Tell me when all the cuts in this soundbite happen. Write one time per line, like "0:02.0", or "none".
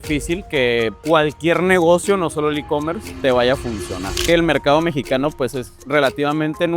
0:01.0
0:03.0
0:04.2